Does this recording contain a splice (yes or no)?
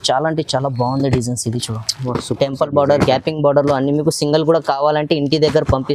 no